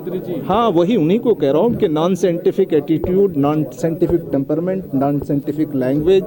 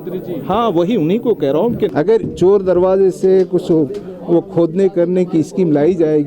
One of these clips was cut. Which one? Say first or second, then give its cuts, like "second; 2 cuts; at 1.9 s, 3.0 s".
second; 1 cut; at 1.9 s